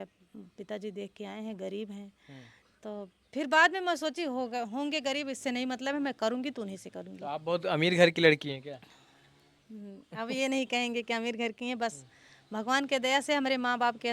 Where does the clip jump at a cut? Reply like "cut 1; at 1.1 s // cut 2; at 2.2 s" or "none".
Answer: none